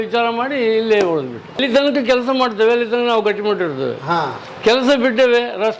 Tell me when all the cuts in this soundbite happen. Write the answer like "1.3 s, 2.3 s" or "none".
1.6 s